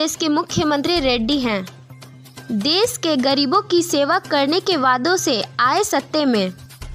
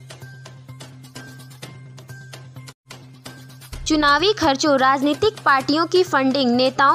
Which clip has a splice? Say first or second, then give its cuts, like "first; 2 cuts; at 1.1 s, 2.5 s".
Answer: second; 2 cuts; at 2.5 s, 3.6 s